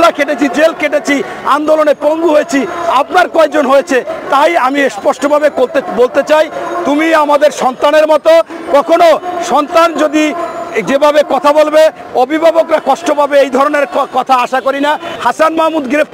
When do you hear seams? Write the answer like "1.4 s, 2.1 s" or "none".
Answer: 15.1 s

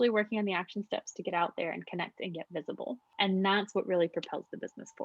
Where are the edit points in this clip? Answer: 3.1 s

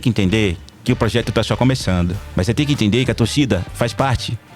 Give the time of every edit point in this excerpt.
2.2 s

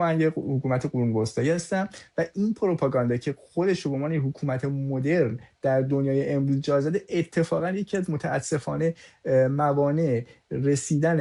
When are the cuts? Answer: none

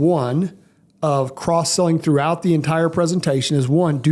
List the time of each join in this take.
none

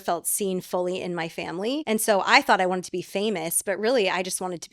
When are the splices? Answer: 1.8 s

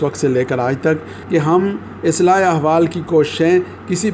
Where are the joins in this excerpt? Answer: 1.1 s

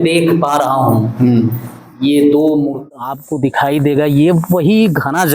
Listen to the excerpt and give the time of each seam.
3.2 s

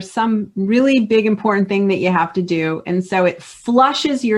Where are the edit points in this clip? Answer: none

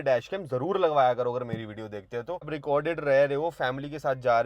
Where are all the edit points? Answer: 2.5 s

